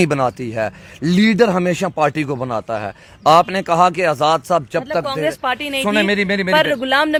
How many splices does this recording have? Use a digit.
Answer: 0